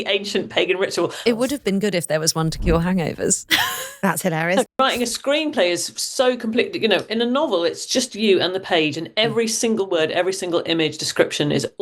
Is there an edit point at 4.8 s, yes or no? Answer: yes